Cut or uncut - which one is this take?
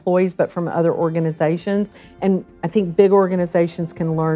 uncut